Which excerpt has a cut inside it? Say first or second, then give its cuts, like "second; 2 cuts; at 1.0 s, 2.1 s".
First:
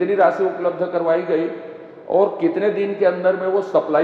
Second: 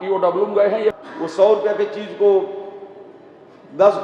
second; 1 cut; at 0.9 s